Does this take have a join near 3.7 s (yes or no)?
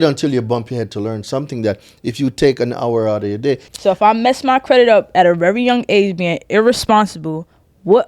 yes